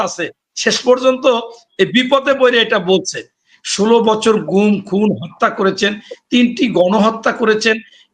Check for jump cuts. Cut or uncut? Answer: cut